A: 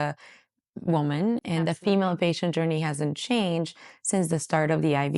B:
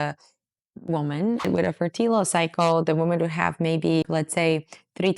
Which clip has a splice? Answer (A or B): B